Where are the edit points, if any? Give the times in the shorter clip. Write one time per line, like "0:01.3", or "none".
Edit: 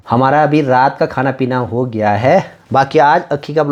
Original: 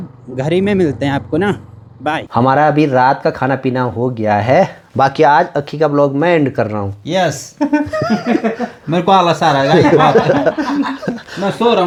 none